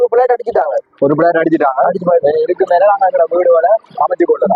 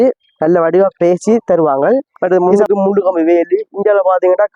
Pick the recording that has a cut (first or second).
second